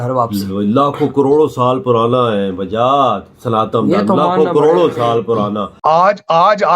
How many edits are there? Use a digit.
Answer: 1